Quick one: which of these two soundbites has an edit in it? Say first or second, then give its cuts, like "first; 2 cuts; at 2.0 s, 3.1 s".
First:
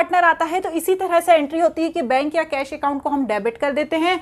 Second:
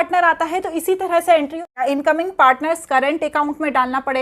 second; 1 cut; at 1.6 s